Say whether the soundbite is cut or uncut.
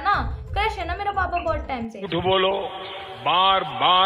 cut